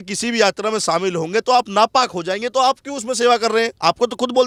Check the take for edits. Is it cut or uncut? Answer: uncut